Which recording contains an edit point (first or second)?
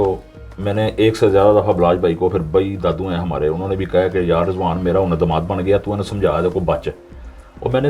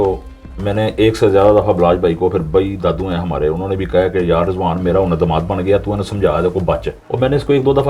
second